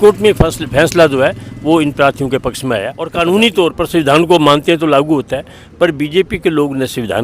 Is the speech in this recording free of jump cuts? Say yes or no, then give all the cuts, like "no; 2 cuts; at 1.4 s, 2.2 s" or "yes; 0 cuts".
no; 1 cut; at 3.0 s